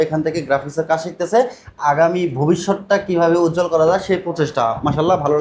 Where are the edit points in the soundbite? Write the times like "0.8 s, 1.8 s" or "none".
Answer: none